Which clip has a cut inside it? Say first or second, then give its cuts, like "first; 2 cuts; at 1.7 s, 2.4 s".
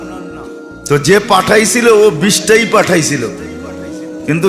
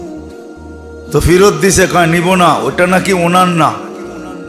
second; 1 cut; at 1.1 s